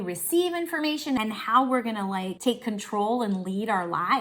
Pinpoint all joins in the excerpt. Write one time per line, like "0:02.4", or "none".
0:01.2
0:02.3